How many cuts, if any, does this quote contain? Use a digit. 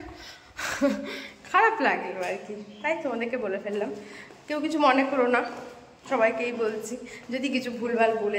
0